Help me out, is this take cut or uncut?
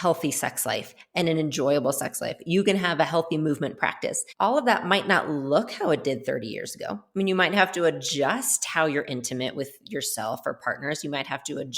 cut